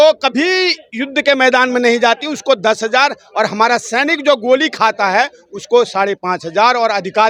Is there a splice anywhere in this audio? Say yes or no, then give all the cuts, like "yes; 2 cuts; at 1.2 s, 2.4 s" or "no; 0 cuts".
no; 0 cuts